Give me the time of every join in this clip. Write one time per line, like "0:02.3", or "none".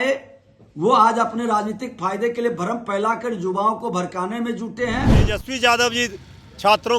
0:05.4